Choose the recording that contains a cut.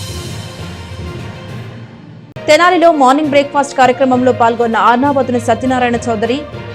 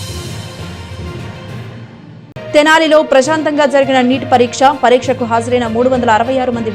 second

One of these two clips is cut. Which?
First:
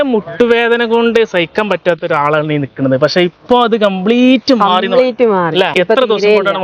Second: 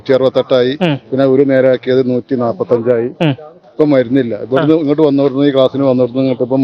first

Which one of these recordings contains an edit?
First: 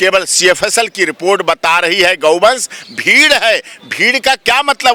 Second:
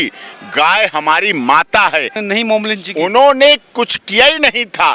second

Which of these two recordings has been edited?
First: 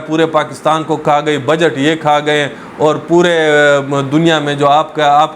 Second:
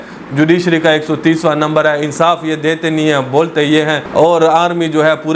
second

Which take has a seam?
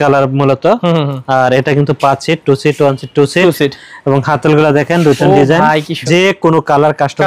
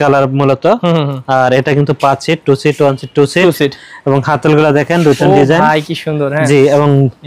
first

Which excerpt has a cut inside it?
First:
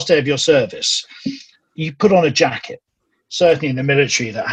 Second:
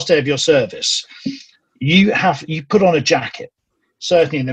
first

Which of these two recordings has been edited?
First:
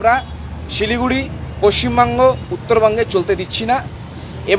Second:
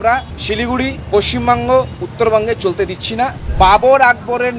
second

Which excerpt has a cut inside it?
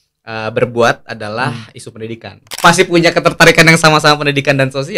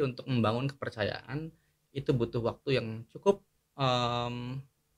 first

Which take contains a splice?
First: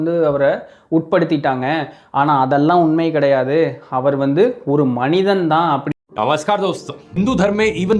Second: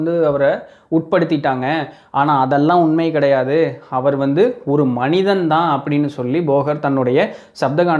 first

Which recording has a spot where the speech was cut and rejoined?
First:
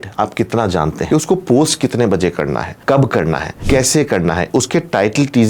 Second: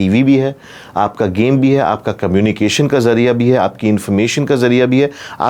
first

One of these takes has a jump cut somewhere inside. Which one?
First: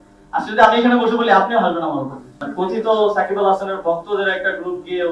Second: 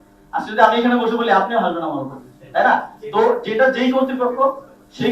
first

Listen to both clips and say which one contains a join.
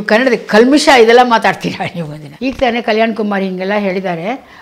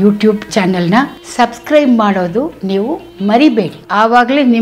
first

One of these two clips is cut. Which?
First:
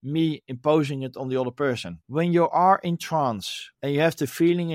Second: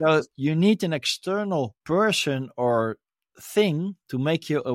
first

